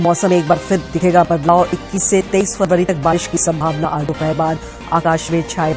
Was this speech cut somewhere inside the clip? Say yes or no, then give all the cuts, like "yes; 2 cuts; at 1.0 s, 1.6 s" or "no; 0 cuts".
no; 0 cuts